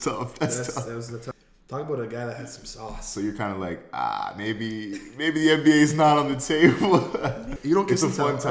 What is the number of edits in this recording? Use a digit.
2